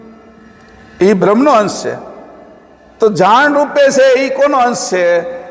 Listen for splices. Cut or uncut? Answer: uncut